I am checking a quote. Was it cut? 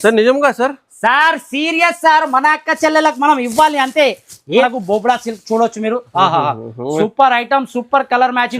yes; 1 cut; at 4.6 s

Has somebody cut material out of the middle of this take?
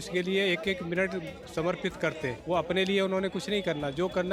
yes; 1 cut; at 2.4 s

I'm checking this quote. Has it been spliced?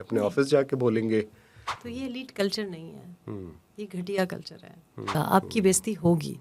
yes; 2 cuts; at 1.9 s, 5.2 s

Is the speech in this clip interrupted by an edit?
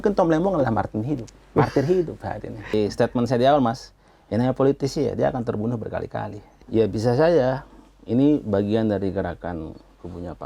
yes; 2 cuts; at 2.7 s, 6.6 s

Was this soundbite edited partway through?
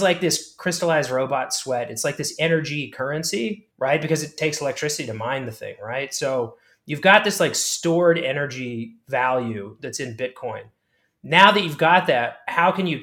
no; 0 cuts

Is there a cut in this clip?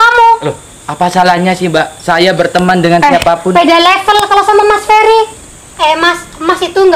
yes; 1 cut; at 5.3 s

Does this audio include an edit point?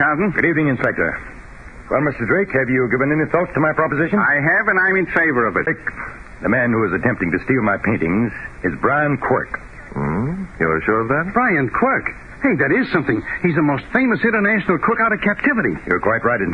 yes; 1 cut; at 5.7 s

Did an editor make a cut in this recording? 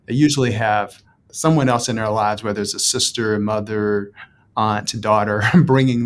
no; 0 cuts

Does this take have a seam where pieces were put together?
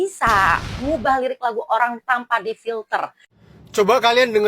yes; 1 cut; at 3.4 s

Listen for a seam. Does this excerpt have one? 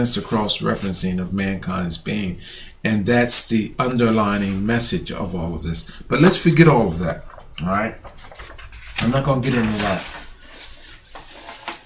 yes; 1 cut; at 5.0 s

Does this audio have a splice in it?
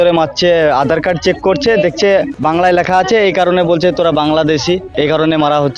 yes; 2 cuts; at 2.3 s, 4.9 s

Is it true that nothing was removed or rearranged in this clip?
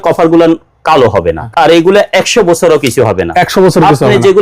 no; 1 cut; at 1.4 s

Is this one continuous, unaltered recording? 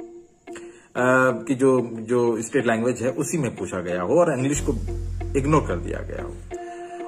no; 1 cut; at 1.0 s

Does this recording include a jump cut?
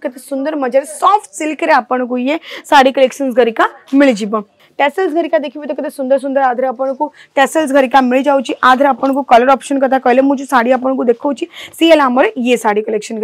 yes; 1 cut; at 4.6 s

